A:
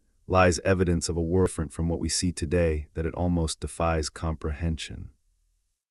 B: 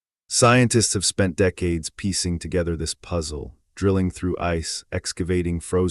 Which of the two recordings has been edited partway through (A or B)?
A